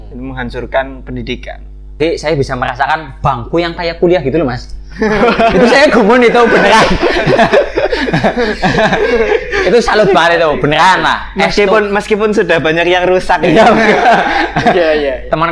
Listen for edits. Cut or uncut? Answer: cut